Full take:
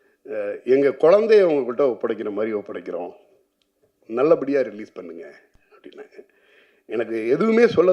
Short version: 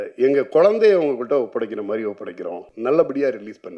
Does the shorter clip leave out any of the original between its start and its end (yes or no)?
yes